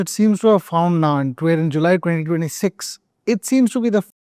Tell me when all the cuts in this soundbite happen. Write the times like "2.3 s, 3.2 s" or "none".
none